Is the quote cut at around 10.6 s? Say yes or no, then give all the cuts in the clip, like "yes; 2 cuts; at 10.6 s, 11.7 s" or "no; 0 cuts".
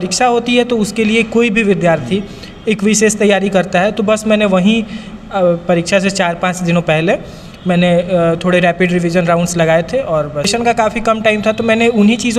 yes; 1 cut; at 10.6 s